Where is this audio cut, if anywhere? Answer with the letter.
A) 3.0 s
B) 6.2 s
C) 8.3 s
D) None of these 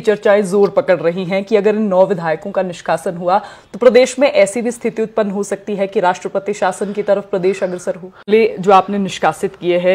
C